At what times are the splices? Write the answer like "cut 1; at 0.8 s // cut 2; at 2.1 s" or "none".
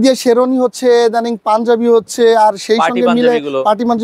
none